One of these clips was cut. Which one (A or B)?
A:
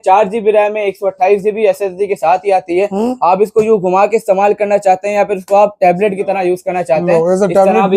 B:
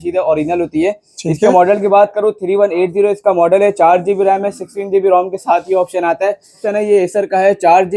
B